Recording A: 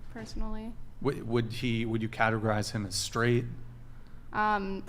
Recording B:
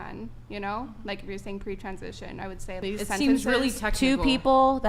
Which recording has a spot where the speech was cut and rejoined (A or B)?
B